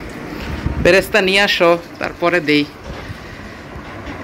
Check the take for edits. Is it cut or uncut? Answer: uncut